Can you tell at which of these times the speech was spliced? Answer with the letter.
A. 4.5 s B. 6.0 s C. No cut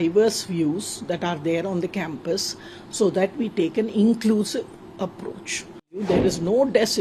B